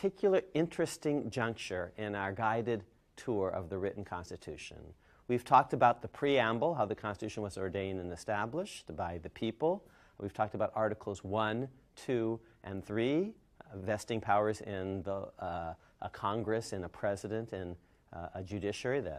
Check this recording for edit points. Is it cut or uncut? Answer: uncut